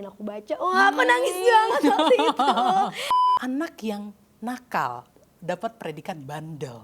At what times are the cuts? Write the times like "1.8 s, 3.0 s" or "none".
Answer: 3.1 s